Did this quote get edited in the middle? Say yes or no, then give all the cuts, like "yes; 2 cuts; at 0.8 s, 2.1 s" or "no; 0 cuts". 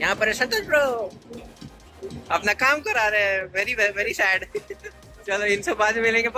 no; 0 cuts